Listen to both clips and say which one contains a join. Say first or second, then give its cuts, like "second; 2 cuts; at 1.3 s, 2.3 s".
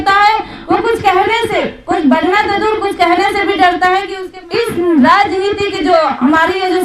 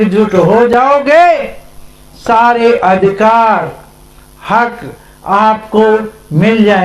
first; 1 cut; at 4.2 s